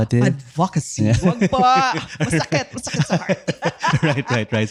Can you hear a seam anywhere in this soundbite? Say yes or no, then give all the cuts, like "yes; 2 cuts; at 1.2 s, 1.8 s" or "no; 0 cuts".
no; 0 cuts